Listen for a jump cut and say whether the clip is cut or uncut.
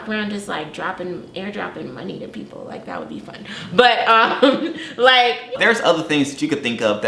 cut